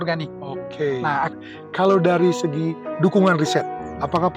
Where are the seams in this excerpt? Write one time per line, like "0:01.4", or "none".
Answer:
0:01.3